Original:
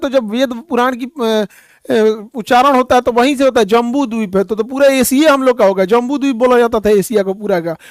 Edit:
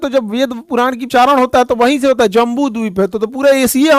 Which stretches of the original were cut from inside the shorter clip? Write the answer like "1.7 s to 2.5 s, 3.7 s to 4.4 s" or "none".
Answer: 1.0 s to 2.4 s

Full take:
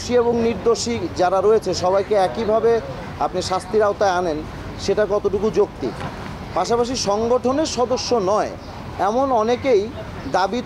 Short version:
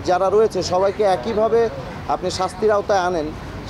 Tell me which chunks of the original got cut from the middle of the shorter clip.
none

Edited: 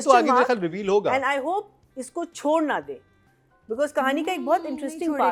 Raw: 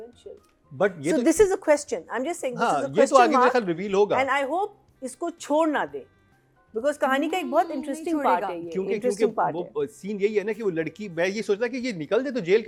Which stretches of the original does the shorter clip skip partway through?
none

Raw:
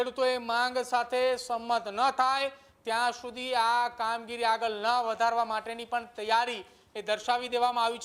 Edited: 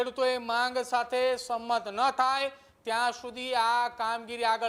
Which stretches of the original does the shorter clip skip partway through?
none

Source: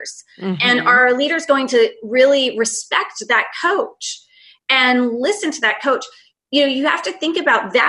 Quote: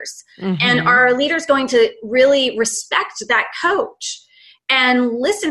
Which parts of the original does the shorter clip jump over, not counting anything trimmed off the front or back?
none

